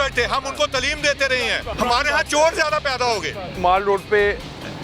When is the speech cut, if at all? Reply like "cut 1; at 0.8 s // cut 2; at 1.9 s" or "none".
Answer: cut 1; at 1.7 s // cut 2; at 3.6 s